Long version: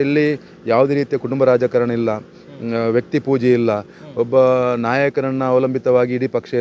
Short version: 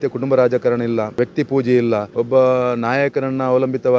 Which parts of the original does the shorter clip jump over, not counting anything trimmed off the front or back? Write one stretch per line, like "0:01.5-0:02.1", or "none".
0:02.3-0:02.9
0:03.8-0:04.1